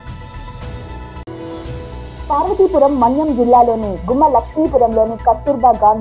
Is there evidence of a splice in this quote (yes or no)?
yes